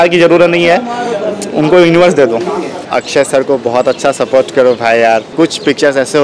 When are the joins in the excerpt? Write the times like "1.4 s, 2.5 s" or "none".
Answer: 2.8 s, 5.3 s